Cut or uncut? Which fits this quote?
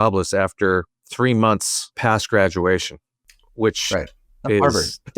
cut